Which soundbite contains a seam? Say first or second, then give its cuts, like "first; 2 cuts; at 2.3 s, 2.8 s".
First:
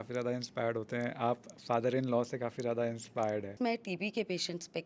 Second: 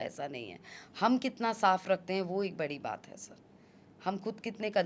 first; 1 cut; at 3.5 s